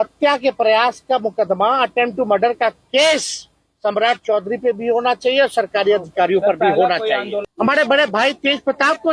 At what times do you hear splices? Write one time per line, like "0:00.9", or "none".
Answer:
0:07.3